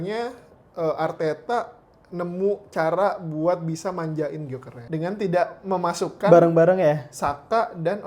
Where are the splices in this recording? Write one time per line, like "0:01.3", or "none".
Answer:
0:04.7